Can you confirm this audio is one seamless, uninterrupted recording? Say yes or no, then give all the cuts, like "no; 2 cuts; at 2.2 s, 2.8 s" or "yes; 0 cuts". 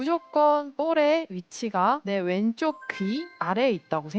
no; 2 cuts; at 2.0 s, 3.3 s